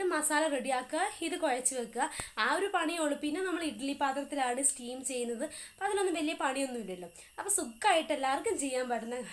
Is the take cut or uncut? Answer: uncut